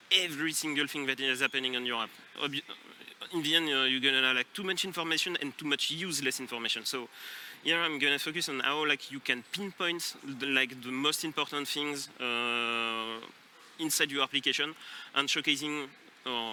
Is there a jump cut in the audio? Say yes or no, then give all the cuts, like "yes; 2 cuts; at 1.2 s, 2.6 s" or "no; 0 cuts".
no; 0 cuts